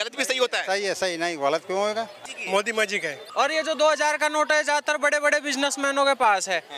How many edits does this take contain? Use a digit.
2